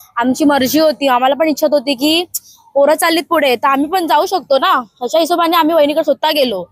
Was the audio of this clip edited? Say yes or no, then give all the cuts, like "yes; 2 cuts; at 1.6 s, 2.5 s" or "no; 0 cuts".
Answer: no; 0 cuts